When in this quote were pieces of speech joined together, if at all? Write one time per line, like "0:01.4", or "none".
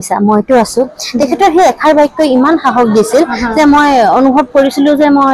none